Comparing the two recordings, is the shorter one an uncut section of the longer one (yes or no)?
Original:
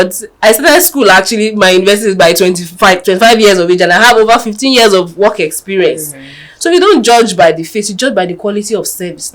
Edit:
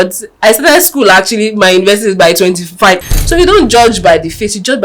no